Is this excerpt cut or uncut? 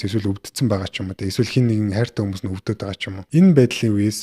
cut